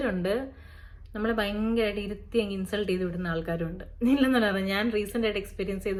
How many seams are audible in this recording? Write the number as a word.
zero